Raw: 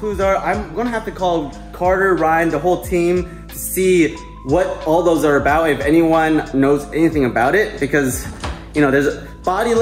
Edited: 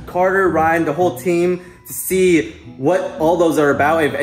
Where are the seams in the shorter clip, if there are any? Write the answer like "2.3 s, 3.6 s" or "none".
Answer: none

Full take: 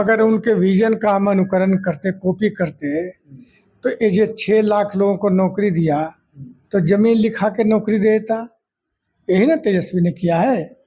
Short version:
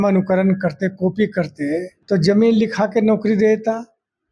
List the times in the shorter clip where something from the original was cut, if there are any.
1.9 s

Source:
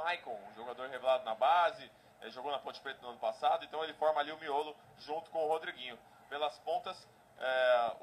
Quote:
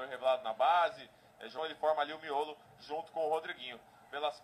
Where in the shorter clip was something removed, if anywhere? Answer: 1.5 s

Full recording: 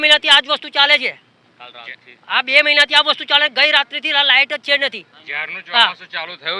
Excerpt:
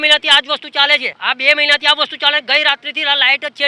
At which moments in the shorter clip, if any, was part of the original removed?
1.1 s

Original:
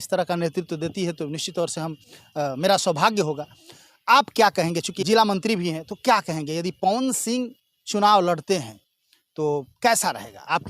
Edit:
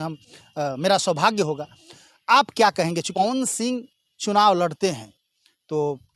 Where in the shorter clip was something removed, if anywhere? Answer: 3.1 s

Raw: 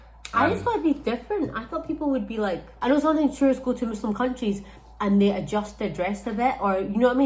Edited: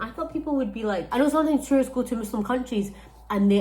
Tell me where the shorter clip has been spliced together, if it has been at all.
1.1 s

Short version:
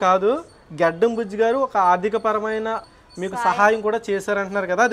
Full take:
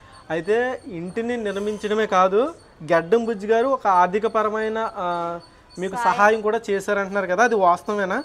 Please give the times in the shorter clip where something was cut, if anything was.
2.9 s

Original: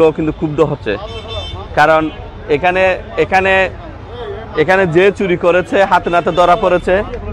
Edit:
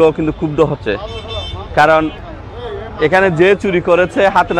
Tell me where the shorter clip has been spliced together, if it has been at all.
2.3 s

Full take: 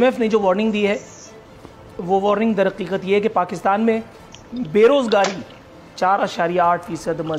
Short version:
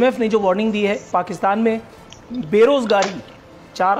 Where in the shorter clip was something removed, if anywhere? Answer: 1.1 s

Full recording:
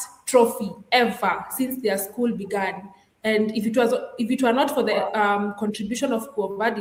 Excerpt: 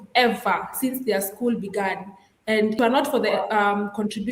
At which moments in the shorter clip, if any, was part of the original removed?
2.8 s

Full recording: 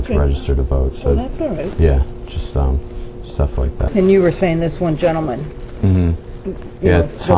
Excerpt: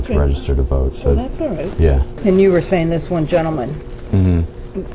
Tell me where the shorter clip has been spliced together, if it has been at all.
2.1 s

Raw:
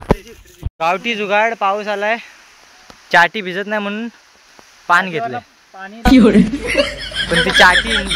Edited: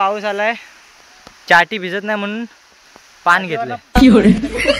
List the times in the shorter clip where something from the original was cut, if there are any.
3.8 s

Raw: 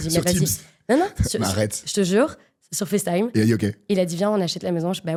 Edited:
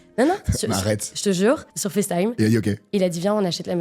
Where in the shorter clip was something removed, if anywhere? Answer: 1.8 s

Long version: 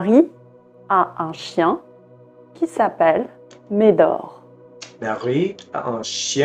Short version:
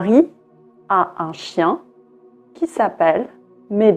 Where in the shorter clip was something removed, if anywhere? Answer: none

